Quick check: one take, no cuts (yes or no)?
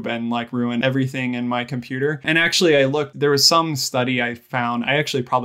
no